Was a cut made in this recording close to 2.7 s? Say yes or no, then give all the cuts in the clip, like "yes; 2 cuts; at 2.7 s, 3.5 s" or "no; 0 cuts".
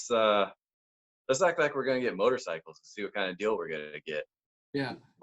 no; 0 cuts